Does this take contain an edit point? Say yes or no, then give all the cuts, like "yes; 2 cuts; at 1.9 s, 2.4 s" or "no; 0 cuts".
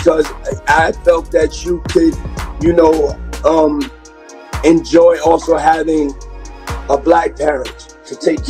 no; 0 cuts